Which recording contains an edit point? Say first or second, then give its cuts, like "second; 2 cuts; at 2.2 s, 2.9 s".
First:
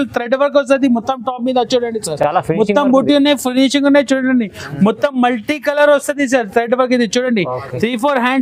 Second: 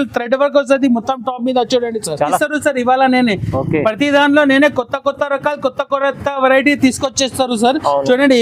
second; 1 cut; at 2.3 s